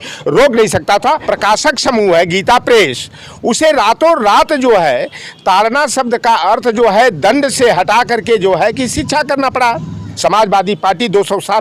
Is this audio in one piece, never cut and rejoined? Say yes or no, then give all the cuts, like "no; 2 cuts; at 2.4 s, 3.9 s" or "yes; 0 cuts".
no; 2 cuts; at 1.2 s, 10.0 s